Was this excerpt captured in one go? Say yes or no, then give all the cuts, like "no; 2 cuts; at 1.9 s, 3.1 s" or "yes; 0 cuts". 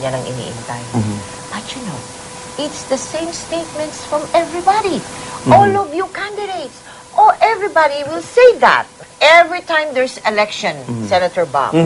no; 1 cut; at 9.0 s